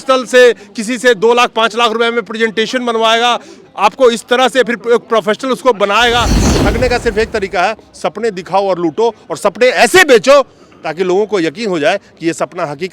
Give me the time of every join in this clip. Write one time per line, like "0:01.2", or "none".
0:06.4